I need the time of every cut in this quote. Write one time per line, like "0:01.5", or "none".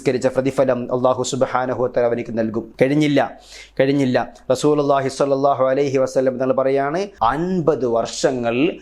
0:02.7
0:07.1